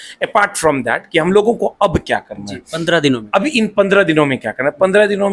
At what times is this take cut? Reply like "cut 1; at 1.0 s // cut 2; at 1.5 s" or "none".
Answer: none